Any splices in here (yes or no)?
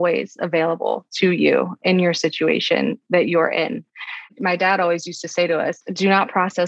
no